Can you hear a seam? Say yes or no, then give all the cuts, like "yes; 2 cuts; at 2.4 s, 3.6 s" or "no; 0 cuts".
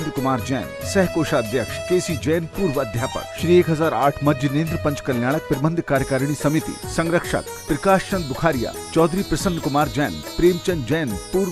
yes; 2 cuts; at 1.8 s, 3.3 s